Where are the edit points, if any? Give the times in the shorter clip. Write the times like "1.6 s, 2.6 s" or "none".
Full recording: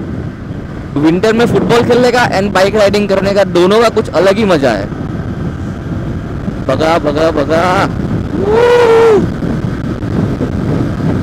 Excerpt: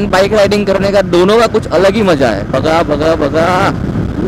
2.5 s

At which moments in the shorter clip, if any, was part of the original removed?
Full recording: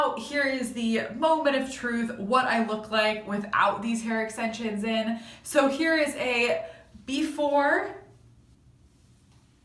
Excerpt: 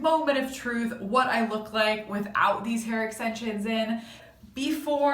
4.2 s

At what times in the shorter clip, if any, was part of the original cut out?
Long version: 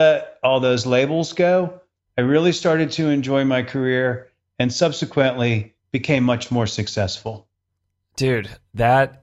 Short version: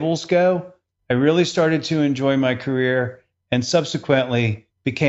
none

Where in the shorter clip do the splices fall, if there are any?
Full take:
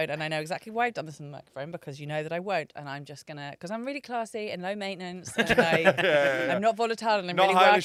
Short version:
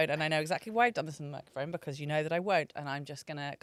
none

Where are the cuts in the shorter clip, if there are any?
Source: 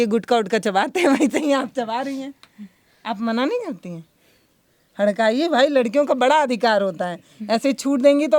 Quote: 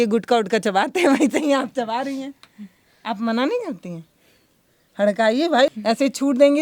5.7 s

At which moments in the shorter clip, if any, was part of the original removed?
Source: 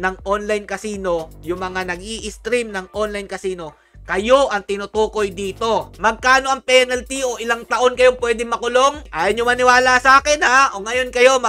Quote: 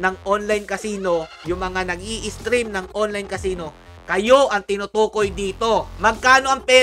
none

